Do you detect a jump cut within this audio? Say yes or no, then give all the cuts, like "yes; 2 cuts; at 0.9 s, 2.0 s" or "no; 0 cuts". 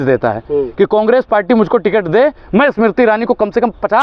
no; 0 cuts